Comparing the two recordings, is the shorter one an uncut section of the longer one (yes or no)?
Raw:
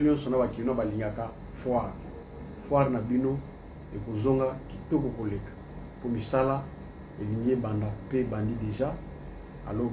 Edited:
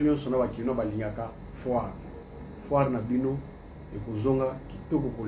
yes